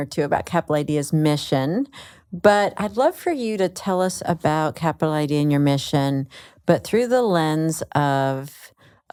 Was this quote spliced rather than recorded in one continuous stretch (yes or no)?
no